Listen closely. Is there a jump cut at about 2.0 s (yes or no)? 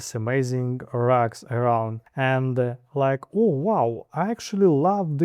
yes